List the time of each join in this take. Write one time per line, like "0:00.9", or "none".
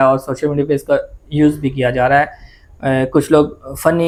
none